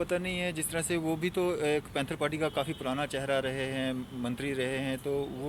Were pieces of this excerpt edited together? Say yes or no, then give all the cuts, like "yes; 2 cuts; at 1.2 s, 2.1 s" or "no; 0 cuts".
no; 0 cuts